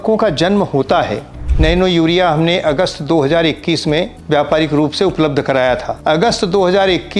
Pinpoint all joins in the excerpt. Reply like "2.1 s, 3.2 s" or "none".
1.5 s, 4.2 s, 5.9 s

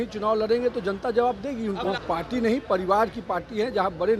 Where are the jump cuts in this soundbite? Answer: 2.0 s

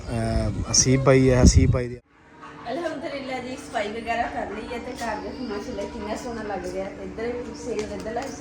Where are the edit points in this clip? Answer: 1.8 s

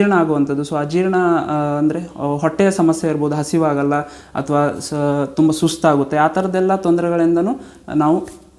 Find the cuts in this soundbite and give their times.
none

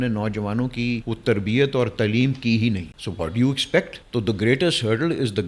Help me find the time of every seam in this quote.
1.0 s, 2.9 s, 4.0 s

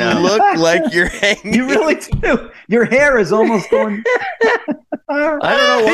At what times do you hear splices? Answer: 4.9 s

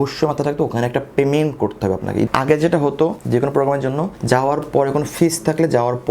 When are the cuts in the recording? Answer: 2.3 s, 3.2 s, 4.2 s

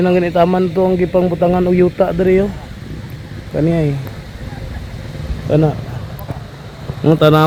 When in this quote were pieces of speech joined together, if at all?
none

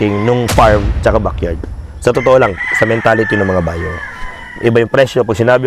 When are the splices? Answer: none

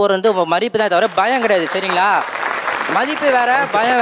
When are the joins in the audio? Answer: none

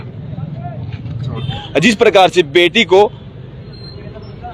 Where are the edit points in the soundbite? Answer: 1.5 s

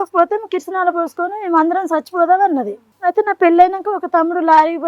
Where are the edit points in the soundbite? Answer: 2.8 s

